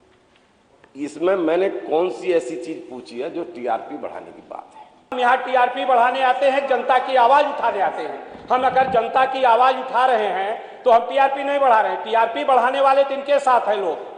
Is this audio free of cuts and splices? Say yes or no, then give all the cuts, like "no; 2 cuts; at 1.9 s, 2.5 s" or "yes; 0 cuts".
no; 1 cut; at 5.1 s